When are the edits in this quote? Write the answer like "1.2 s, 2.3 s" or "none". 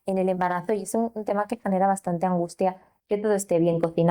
2.9 s